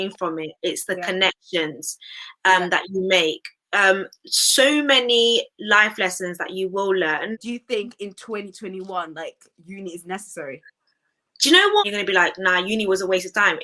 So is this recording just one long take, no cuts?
no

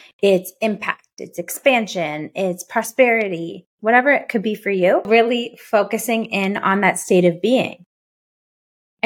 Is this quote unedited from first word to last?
no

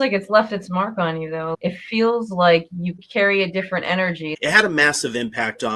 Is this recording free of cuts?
no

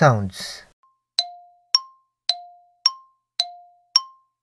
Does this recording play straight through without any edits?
no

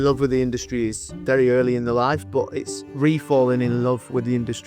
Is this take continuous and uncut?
no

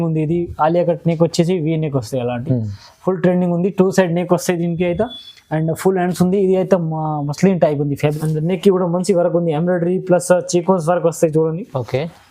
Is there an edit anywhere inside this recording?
yes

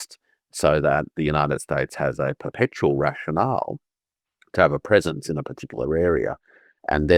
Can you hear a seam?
no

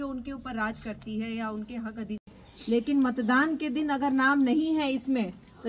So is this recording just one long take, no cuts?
no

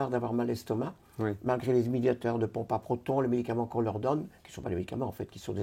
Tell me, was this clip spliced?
no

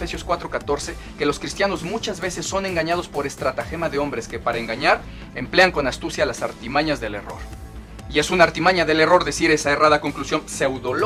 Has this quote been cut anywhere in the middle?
no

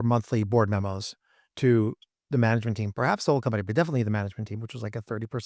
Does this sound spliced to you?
no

